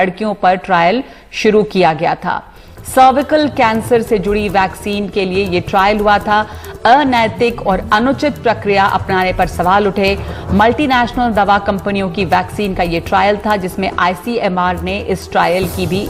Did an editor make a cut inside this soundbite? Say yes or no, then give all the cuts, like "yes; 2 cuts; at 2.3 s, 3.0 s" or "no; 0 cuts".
no; 0 cuts